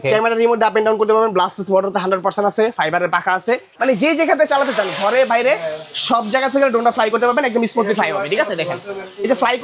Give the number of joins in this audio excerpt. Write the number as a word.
one